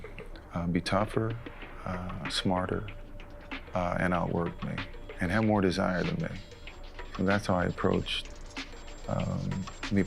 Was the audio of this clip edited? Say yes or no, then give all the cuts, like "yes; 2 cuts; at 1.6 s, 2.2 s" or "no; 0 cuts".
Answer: no; 0 cuts